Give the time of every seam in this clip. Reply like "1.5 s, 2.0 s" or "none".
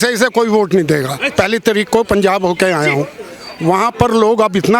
1.2 s

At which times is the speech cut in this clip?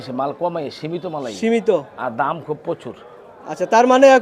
none

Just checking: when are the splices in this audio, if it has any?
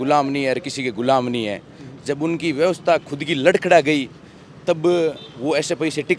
none

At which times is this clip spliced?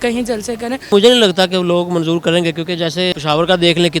0.9 s, 3.1 s

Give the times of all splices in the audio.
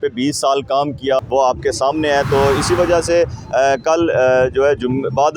1.2 s

